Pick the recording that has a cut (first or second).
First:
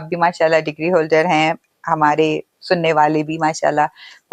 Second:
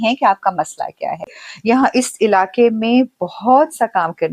second